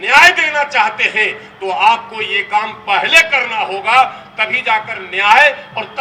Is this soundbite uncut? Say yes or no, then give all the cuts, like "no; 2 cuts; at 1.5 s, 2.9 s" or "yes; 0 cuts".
yes; 0 cuts